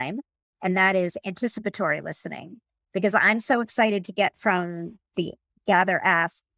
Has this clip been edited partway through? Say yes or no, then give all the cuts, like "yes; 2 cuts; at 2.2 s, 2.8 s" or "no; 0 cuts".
no; 0 cuts